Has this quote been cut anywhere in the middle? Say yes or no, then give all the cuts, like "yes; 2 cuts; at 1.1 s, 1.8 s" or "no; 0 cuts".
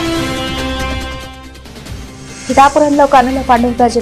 no; 0 cuts